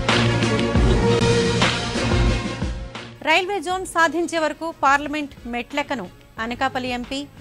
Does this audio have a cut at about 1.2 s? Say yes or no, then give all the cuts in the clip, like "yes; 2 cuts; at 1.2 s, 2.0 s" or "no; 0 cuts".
yes; 1 cut; at 1.2 s